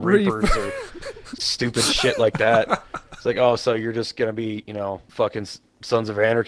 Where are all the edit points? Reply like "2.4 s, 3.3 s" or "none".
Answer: none